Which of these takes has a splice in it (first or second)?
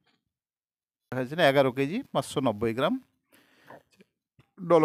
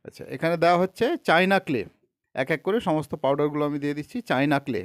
first